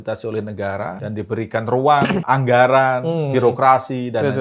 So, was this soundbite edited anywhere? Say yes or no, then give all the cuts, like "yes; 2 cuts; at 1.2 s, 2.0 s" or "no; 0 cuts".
yes; 2 cuts; at 1.0 s, 2.2 s